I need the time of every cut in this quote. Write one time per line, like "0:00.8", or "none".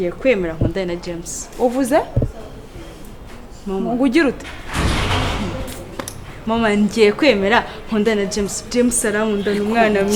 none